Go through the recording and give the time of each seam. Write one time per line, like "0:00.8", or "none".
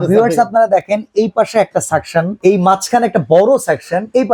none